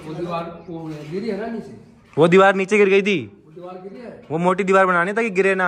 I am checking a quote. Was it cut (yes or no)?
no